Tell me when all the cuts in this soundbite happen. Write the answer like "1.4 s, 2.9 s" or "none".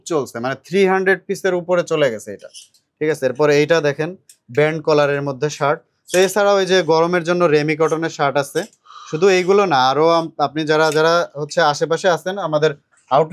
none